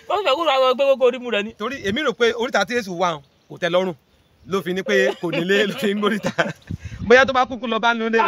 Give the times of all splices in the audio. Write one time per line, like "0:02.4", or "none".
none